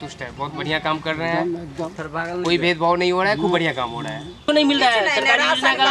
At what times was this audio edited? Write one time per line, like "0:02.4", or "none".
0:04.5